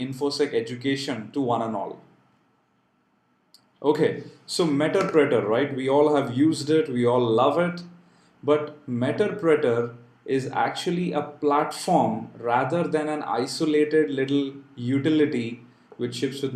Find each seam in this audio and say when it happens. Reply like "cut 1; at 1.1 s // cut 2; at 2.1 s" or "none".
cut 1; at 2.3 s